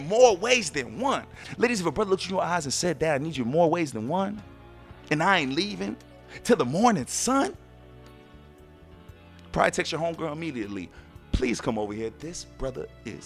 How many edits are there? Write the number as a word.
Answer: two